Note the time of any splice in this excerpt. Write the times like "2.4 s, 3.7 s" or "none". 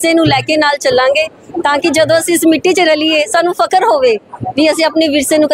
none